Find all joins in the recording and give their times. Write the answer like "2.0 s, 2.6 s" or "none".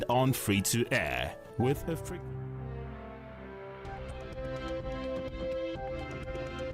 2.0 s